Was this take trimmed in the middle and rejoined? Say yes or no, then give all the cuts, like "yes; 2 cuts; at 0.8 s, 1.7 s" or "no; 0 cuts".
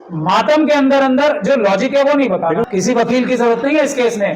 yes; 1 cut; at 2.6 s